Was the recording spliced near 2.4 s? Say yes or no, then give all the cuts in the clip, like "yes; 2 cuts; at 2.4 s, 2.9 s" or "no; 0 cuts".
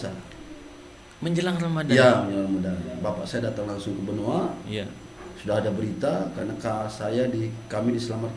no; 0 cuts